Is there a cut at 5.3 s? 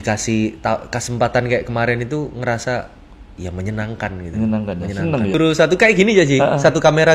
yes; 1 cut; at 5.3 s

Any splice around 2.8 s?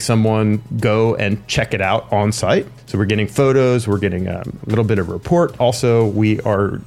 yes; 2 cuts; at 2.8 s, 5.6 s

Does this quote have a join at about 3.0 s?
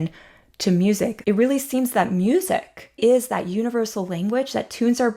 yes; 2 cuts; at 1.2 s, 3.0 s

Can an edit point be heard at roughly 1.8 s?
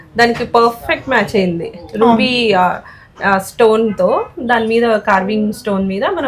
no; 0 cuts

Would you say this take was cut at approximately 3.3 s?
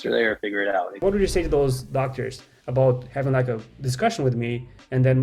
no; 1 cut; at 1.0 s

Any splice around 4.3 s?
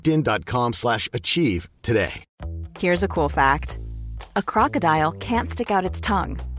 no; 1 cut; at 2.3 s

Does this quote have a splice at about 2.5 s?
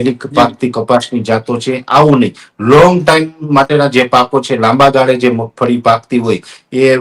no; 0 cuts

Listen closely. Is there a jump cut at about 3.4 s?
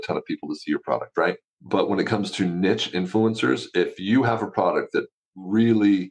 no; 1 cut; at 1.5 s

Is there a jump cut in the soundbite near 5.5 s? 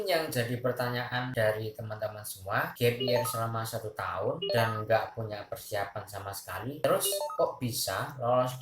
no; 1 cut; at 1.3 s

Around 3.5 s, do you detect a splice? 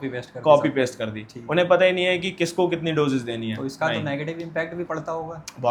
no; 0 cuts

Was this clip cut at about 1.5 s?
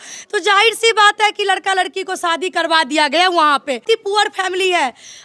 no; 1 cut; at 3.8 s

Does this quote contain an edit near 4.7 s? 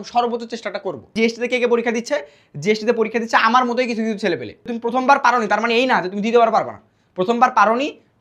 yes; 2 cuts; at 1.1 s, 4.7 s

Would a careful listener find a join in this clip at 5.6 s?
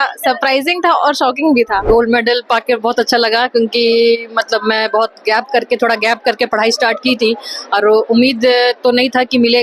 no; 1 cut; at 1.8 s

